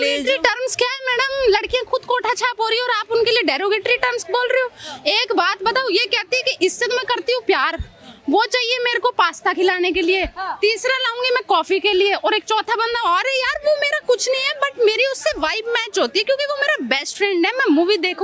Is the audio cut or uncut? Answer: uncut